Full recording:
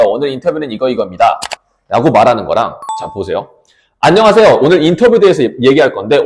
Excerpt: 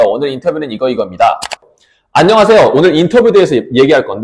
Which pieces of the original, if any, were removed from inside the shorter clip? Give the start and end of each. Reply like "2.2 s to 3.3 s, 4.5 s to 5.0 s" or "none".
1.7 s to 3.6 s